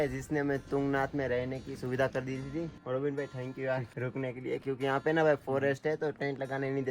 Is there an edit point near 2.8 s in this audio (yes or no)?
yes